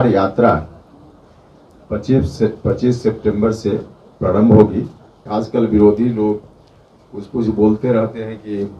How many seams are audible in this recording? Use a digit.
1